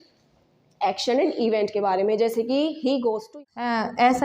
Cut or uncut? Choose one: cut